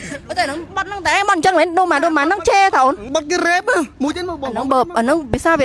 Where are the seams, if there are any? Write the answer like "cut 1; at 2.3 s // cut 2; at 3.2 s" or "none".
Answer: cut 1; at 3.0 s